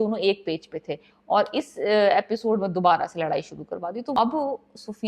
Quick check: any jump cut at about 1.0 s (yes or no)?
no